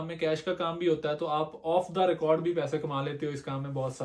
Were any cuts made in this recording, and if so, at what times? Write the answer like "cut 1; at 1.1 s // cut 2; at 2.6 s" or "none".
none